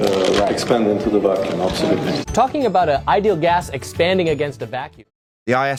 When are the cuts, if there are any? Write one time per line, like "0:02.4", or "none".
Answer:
none